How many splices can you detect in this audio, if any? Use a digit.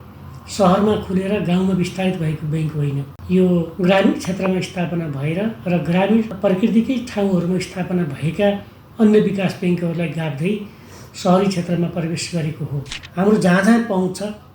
4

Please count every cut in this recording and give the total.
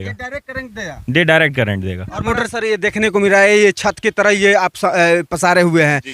1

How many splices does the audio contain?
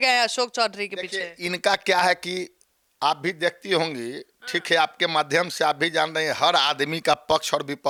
0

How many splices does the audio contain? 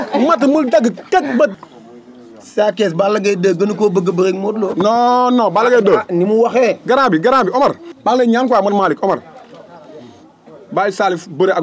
2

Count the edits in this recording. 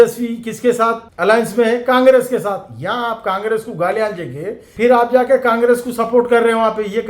1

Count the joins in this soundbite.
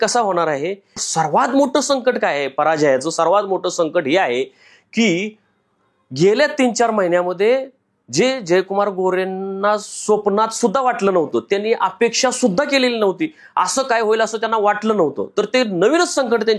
1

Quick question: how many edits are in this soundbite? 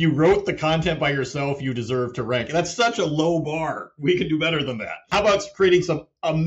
1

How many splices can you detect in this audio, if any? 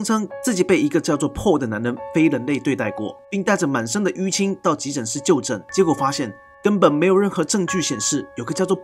2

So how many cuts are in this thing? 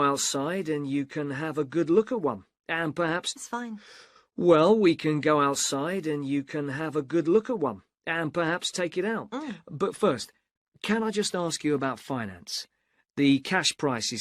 1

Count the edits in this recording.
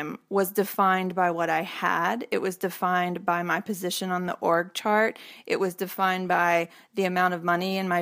0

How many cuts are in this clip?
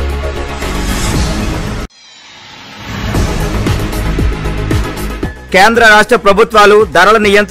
2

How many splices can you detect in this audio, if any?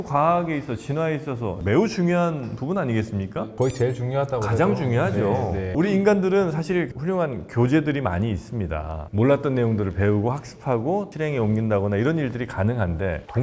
0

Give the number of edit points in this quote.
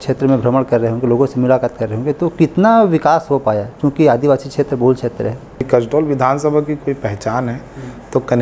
1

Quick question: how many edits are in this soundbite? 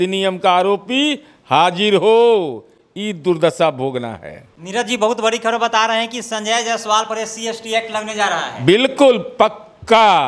0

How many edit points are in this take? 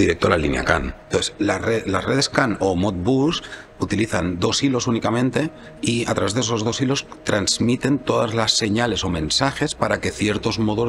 1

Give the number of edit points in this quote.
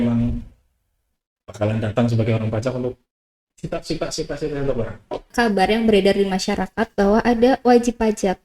1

